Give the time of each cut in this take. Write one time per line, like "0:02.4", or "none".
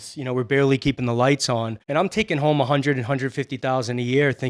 0:01.8